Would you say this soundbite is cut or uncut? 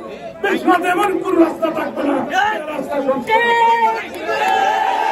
uncut